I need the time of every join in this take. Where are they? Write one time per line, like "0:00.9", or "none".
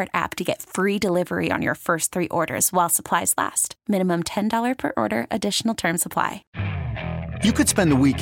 0:06.4